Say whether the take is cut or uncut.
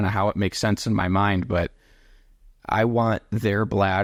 uncut